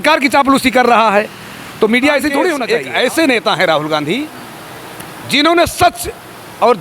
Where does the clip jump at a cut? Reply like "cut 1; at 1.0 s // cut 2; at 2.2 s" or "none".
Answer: cut 1; at 2.6 s

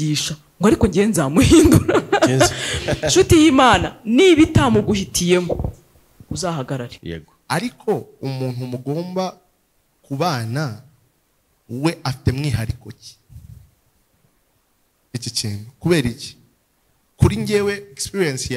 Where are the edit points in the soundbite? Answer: cut 1; at 7.0 s

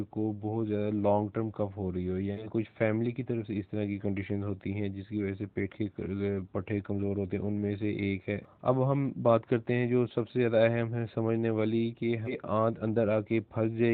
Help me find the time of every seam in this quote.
cut 1; at 2.5 s // cut 2; at 8.4 s // cut 3; at 12.4 s

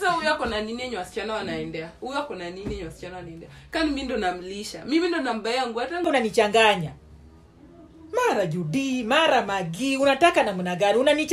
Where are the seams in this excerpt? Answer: cut 1; at 6.1 s

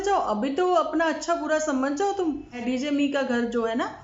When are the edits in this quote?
cut 1; at 2.6 s

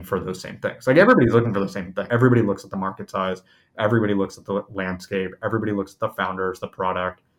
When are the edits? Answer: cut 1; at 2.0 s

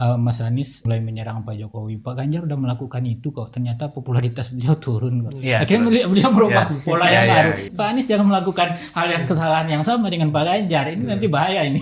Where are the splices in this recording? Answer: cut 1; at 0.9 s // cut 2; at 7.7 s

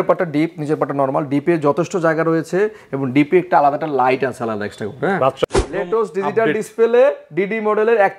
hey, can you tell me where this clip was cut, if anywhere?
cut 1; at 5.4 s

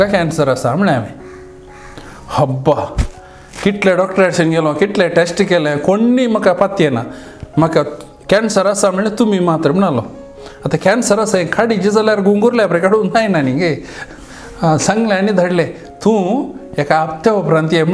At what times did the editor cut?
none

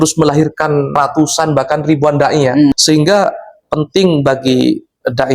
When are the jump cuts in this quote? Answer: cut 1; at 0.9 s // cut 2; at 2.7 s

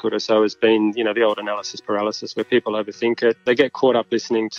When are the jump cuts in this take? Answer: cut 1; at 3.4 s

